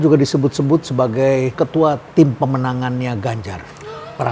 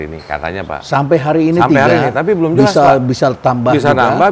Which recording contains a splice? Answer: first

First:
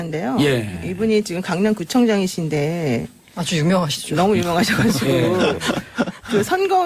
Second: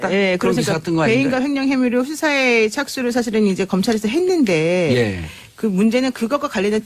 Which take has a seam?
second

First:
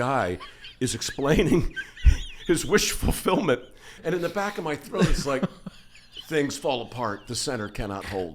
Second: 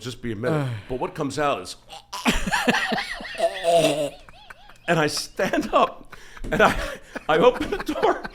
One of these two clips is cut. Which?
first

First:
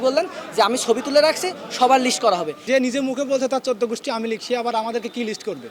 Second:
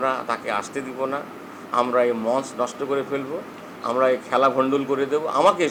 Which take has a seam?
first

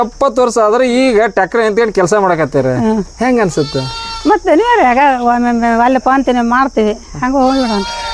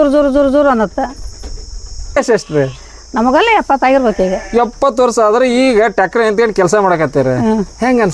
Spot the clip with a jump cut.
second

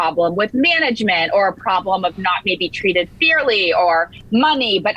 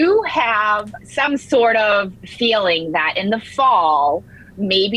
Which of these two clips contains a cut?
second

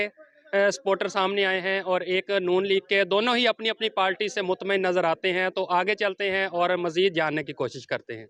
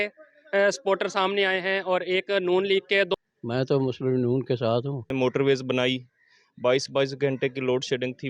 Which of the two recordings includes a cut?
second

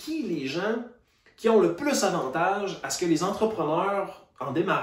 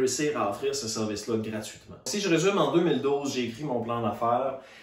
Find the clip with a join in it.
second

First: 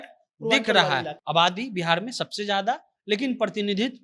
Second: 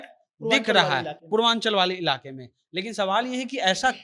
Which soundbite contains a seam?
first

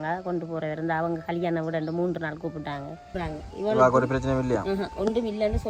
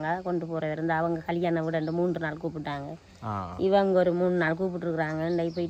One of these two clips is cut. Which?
first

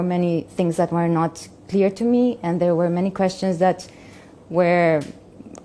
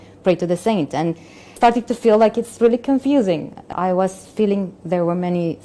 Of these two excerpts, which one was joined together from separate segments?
second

